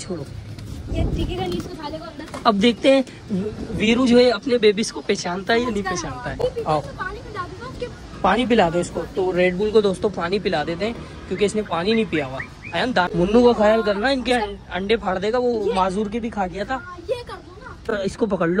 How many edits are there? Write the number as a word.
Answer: three